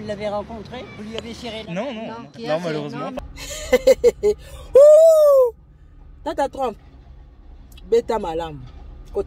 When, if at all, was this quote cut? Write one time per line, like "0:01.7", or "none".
0:03.1